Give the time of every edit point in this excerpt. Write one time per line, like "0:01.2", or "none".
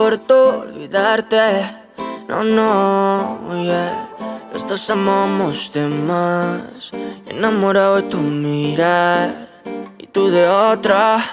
0:04.5